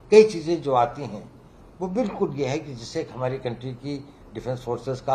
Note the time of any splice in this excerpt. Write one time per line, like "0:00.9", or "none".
none

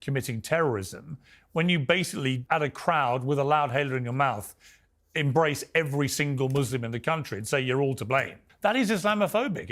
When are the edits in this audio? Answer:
0:02.4
0:08.5

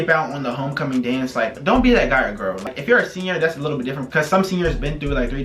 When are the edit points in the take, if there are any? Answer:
none

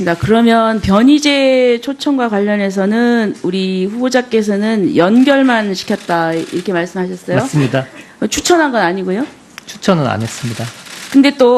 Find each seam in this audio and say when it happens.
none

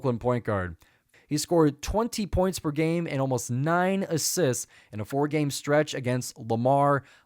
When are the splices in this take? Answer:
0:01.0

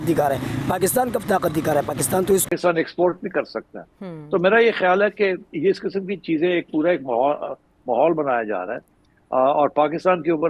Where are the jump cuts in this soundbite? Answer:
0:02.4

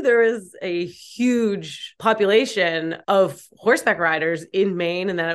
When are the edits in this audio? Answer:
0:01.9
0:02.9

